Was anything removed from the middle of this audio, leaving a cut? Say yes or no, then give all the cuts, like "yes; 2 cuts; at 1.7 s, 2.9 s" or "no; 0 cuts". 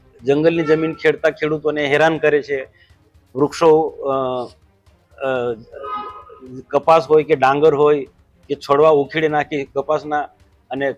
no; 0 cuts